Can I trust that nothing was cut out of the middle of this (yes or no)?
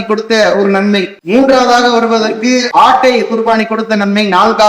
no